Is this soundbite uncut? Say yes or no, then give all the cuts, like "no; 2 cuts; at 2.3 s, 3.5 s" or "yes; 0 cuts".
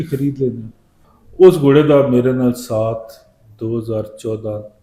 yes; 0 cuts